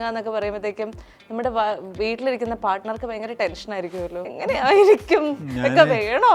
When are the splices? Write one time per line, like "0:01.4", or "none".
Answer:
0:04.3